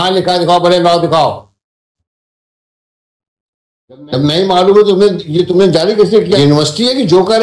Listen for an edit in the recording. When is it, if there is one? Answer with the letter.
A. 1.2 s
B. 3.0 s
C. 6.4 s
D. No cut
C